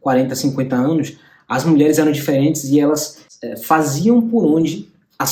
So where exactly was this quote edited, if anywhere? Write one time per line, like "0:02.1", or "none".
none